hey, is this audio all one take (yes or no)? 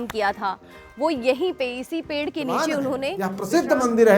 no